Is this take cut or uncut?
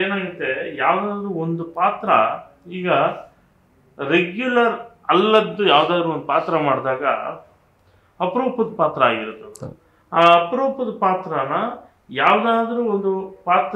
uncut